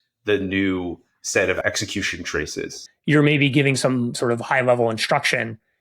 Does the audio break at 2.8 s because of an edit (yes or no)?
yes